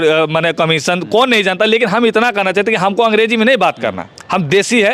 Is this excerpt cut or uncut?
uncut